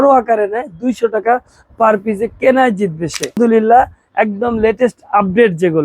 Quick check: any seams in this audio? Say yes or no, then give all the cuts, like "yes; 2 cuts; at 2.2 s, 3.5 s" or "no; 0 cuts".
yes; 1 cut; at 3.4 s